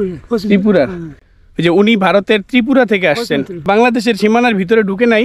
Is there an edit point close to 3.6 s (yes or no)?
yes